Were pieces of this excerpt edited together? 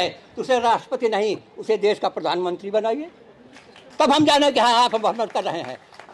no; 0 cuts

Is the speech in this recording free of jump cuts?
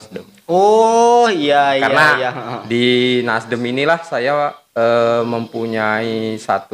yes; 0 cuts

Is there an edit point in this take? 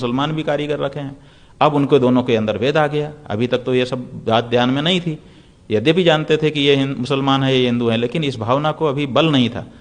no; 0 cuts

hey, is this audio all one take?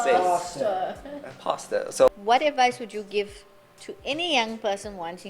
no; 1 cut; at 2.1 s

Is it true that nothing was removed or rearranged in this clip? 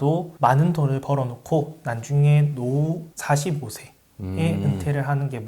no; 1 cut; at 3.1 s

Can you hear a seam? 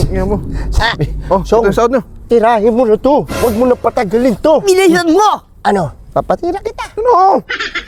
no; 0 cuts

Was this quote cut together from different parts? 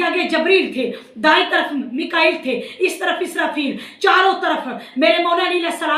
no; 0 cuts

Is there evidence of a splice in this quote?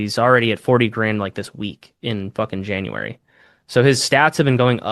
no; 0 cuts

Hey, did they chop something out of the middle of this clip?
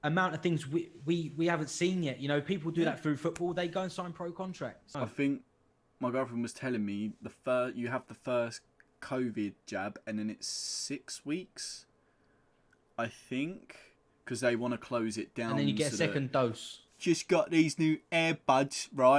yes; 2 cuts; at 4.9 s, 16.7 s

